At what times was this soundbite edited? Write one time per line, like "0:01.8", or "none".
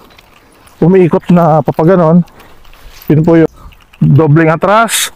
0:03.5